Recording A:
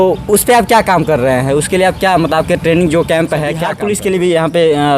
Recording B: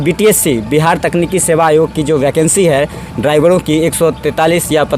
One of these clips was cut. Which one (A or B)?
A